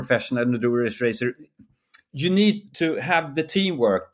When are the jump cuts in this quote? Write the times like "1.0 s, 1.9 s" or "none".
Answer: 2.7 s